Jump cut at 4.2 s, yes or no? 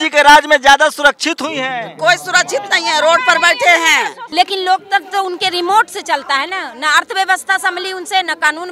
yes